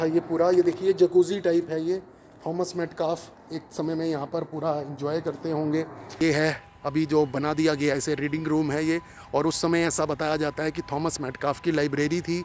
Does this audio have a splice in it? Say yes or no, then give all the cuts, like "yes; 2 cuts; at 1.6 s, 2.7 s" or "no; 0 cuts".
yes; 1 cut; at 6.2 s